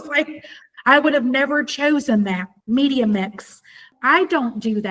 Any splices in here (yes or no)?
yes